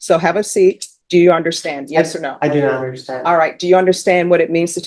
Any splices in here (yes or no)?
yes